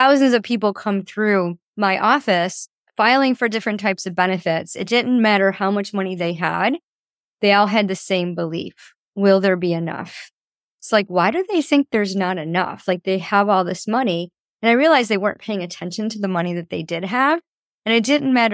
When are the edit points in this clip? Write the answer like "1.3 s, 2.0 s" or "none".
1.6 s

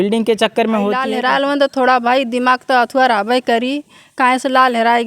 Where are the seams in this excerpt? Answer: 1.1 s

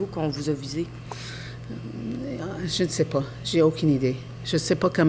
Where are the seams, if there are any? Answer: none

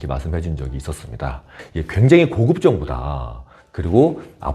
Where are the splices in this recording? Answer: 1.5 s

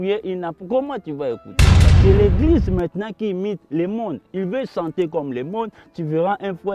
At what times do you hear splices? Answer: 1.8 s

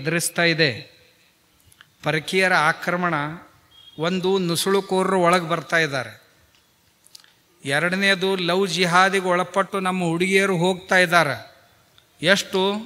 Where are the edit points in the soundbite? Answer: none

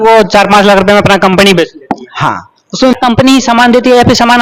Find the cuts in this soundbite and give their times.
2.9 s

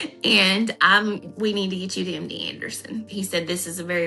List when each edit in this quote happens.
3.1 s

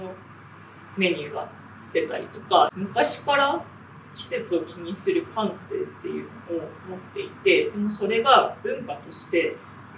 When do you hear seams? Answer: 2.7 s

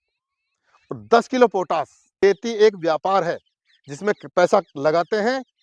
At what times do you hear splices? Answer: 2.0 s

